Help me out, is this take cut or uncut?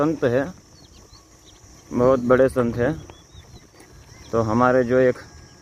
uncut